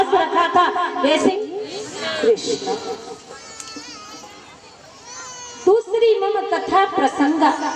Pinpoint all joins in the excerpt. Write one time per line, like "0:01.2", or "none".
none